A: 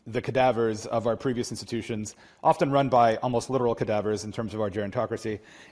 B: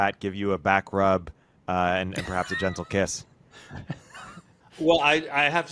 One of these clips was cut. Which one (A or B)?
B